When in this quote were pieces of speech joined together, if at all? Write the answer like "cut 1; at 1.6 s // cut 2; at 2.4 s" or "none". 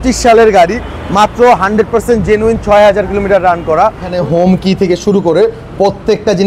cut 1; at 4.1 s